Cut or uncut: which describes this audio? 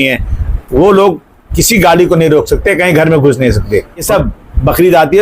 cut